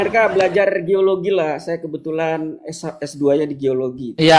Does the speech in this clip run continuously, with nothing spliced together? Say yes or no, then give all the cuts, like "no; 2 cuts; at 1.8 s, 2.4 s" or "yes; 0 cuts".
yes; 0 cuts